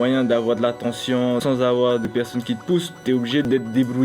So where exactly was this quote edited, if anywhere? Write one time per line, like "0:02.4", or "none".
0:01.4